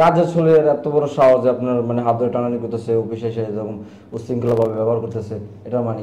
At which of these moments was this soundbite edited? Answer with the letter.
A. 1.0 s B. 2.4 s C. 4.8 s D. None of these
D